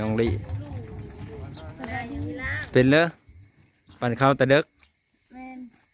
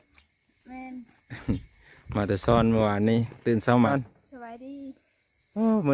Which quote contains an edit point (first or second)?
second